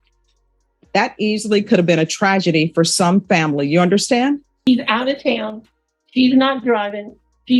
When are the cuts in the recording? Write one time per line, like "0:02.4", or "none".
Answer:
0:04.7